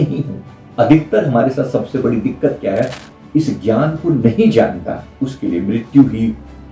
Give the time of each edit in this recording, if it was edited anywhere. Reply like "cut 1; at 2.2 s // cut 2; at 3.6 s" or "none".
cut 1; at 3.1 s

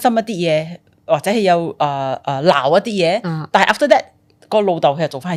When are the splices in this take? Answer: none

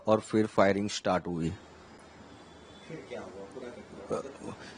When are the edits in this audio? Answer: none

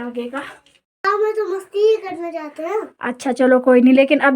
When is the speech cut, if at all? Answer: cut 1; at 1.0 s

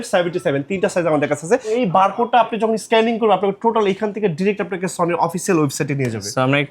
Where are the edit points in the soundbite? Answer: cut 1; at 1.7 s

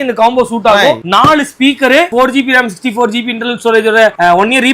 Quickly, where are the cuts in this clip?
cut 1; at 1.0 s // cut 2; at 2.1 s

